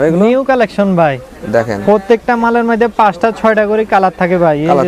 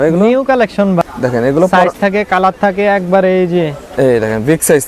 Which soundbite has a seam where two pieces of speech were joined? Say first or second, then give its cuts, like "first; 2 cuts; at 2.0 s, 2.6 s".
second; 1 cut; at 1.0 s